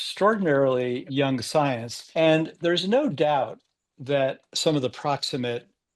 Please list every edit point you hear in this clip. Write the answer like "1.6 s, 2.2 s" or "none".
1.0 s, 1.9 s, 4.5 s